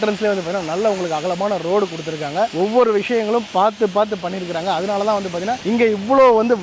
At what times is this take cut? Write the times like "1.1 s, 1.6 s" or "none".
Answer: none